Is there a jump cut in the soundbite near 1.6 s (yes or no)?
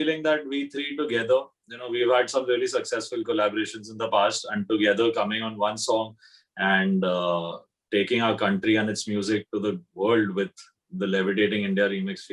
no